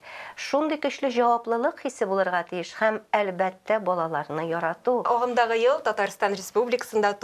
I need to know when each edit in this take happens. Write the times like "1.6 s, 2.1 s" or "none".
5.1 s